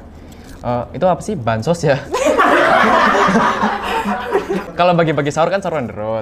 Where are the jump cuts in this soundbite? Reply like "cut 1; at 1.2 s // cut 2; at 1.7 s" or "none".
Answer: cut 1; at 4.7 s